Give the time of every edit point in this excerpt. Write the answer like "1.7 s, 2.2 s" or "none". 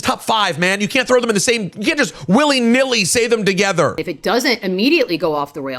4.0 s